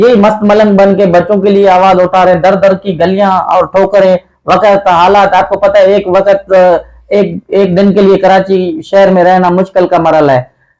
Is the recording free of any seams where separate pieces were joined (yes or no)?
yes